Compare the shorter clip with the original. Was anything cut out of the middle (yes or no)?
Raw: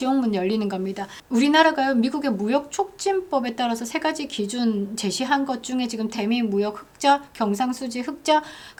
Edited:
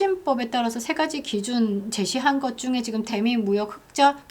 no